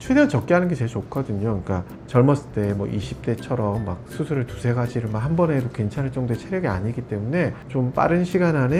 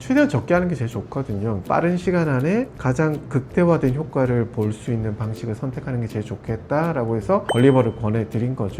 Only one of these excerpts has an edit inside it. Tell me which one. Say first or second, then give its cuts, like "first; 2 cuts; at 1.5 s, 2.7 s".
second; 3 cuts; at 1.6 s, 2.7 s, 7.5 s